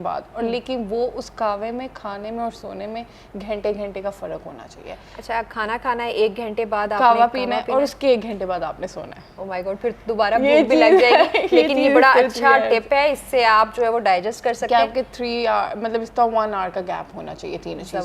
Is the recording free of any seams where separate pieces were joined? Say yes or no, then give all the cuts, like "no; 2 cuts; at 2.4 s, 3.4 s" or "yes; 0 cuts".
yes; 0 cuts